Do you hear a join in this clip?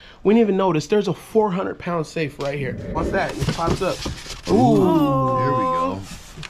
yes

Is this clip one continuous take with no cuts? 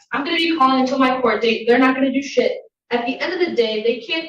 yes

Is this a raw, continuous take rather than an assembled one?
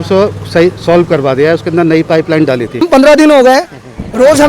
no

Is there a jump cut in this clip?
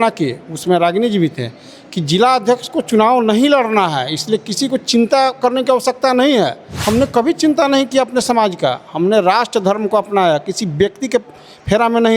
yes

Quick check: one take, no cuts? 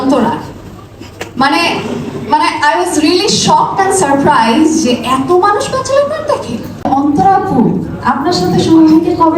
no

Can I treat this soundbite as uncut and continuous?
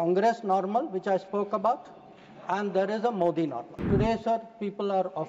no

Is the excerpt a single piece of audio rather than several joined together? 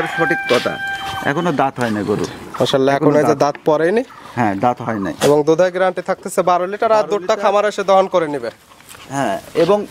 yes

